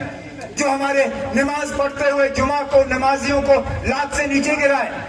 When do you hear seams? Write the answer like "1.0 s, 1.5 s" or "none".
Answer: none